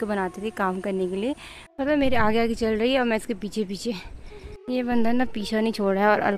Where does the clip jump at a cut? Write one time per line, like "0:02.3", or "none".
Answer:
0:01.7
0:04.6

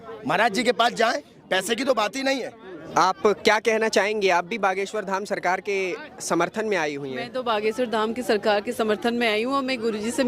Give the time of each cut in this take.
0:02.8

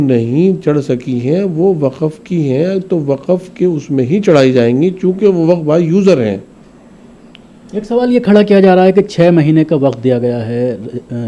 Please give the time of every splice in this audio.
none

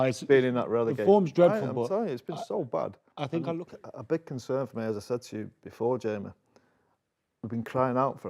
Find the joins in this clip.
0:03.6

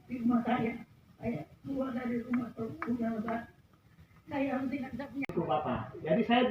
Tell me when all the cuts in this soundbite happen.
0:05.3

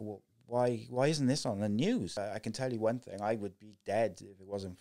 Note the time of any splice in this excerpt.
0:02.1

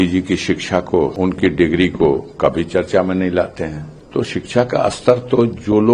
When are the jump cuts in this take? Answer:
0:01.1
0:04.3

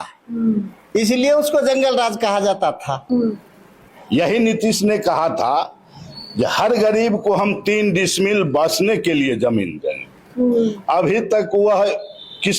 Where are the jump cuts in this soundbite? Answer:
0:03.1

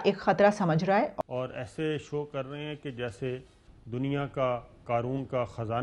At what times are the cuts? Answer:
0:01.1

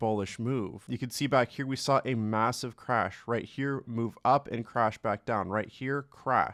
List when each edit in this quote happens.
none

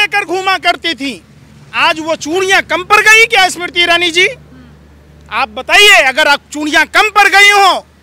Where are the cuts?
none

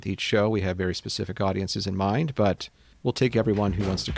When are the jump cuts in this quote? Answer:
0:02.8

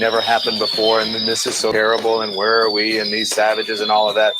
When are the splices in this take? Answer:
0:01.7

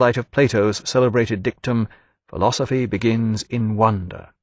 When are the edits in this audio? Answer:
0:03.4

